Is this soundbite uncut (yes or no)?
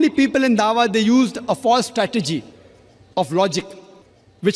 yes